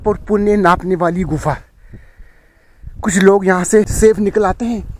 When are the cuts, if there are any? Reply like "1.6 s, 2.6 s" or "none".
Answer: 3.9 s